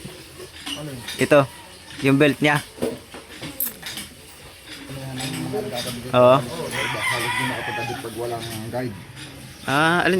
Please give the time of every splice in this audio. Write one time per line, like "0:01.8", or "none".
0:06.8